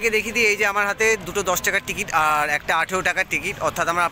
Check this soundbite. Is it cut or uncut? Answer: uncut